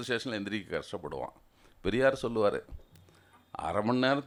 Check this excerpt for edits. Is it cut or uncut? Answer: uncut